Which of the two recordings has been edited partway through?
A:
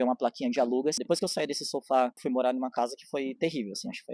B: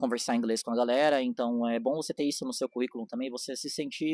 A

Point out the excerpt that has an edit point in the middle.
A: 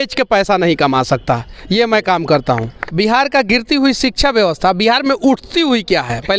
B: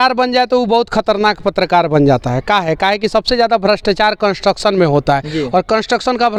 A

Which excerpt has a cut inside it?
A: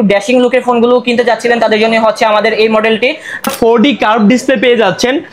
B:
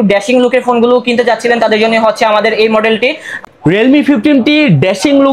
A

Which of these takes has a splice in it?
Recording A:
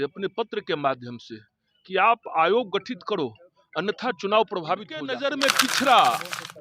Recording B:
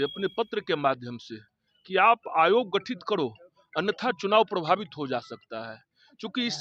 A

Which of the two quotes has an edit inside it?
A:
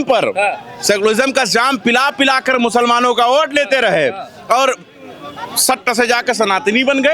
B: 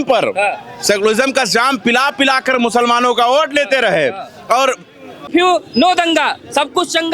B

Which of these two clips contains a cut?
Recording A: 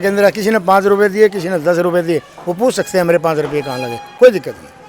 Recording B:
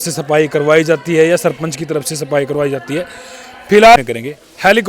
B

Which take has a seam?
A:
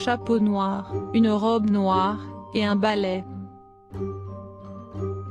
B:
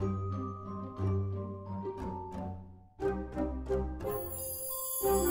A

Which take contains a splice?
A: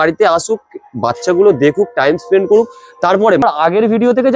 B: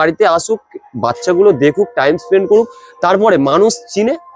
A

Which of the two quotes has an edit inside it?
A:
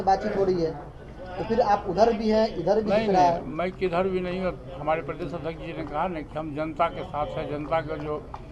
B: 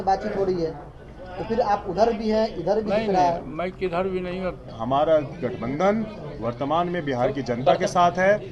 B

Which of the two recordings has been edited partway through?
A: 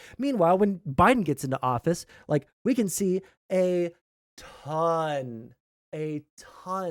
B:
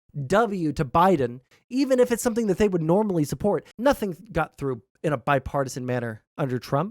B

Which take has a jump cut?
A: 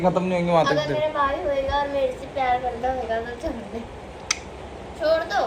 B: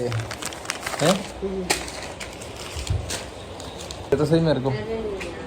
B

